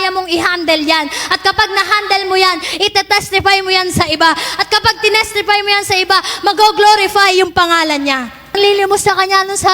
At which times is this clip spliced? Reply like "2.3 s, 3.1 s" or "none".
8.6 s